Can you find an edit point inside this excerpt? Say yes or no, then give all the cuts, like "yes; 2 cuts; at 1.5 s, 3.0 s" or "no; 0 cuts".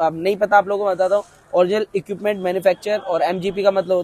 no; 0 cuts